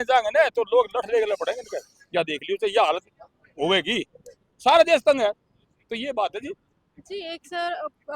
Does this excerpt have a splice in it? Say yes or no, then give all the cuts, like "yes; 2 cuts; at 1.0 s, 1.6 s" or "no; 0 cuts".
no; 0 cuts